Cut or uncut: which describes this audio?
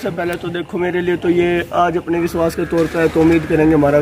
uncut